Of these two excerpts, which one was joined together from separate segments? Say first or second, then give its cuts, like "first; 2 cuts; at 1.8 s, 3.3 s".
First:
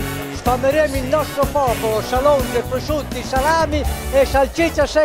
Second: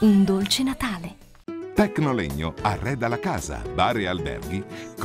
second; 1 cut; at 1.5 s